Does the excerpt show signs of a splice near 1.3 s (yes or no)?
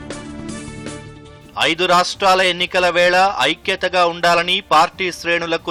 no